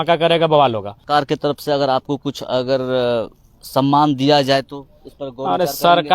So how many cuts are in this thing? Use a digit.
1